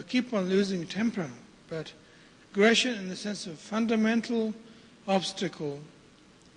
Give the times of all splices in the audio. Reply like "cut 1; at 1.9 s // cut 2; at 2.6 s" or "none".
cut 1; at 4.6 s

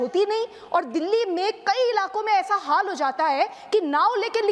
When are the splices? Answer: none

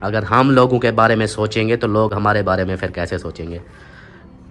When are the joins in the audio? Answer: none

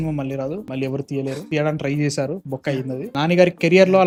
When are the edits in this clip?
none

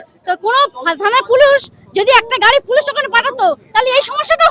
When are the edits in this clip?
none

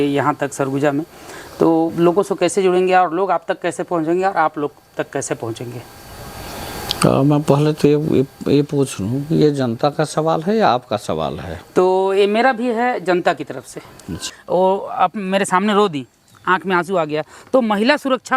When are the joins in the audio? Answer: cut 1; at 14.3 s

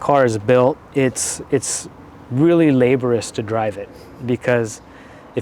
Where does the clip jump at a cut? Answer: none

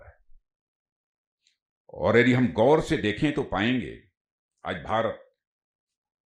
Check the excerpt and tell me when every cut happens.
none

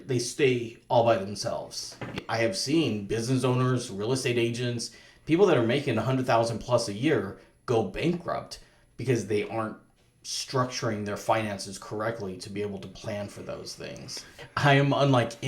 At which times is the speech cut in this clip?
cut 1; at 2.2 s // cut 2; at 14.4 s

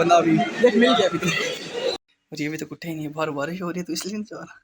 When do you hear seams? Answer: cut 1; at 2.0 s

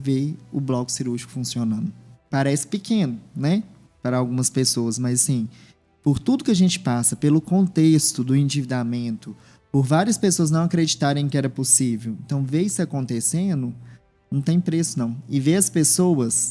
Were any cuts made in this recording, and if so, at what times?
none

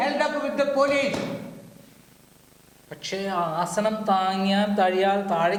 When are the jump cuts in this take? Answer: none

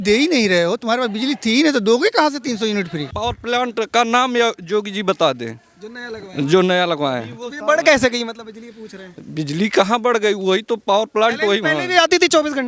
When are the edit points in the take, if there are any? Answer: cut 1; at 3.1 s

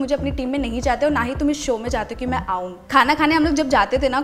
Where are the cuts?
cut 1; at 2.8 s

